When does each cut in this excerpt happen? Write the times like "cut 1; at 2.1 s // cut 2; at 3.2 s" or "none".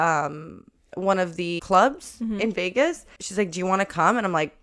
cut 1; at 1.6 s // cut 2; at 3.2 s